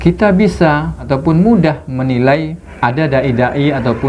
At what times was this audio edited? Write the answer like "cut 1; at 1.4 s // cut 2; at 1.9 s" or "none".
cut 1; at 1.0 s // cut 2; at 2.6 s